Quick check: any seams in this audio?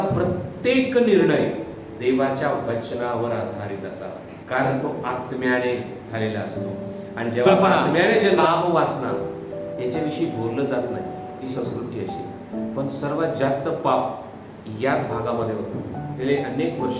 yes; 1 cut; at 8.4 s

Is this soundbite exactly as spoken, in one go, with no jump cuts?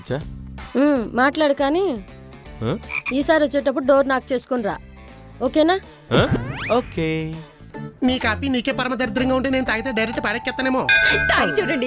no; 1 cut; at 7.7 s

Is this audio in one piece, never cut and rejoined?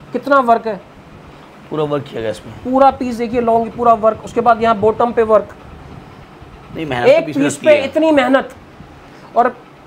yes; 0 cuts

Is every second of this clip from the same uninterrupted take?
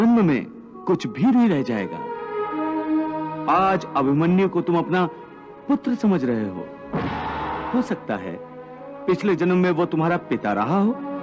no; 1 cut; at 7.7 s

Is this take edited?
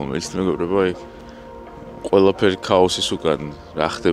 no; 0 cuts

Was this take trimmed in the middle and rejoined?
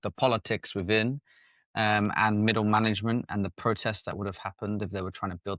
no; 0 cuts

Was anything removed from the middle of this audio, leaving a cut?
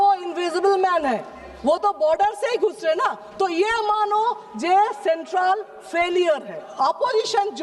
yes; 1 cut; at 6.6 s

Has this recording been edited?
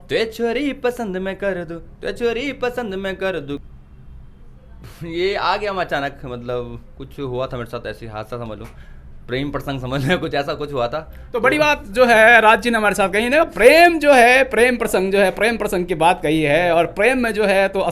yes; 1 cut; at 3.6 s

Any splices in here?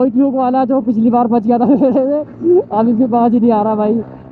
no; 0 cuts

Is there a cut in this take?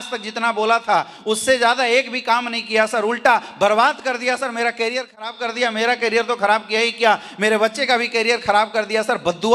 no; 0 cuts

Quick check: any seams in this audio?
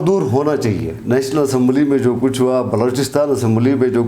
yes; 1 cut; at 1.0 s

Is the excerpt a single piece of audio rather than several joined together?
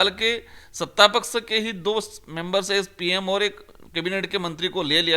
yes; 0 cuts

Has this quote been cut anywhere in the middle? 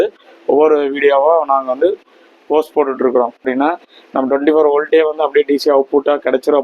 yes; 1 cut; at 3.5 s

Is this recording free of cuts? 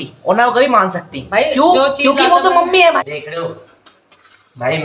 no; 1 cut; at 3.0 s

